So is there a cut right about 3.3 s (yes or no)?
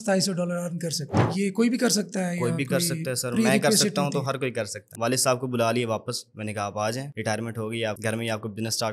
no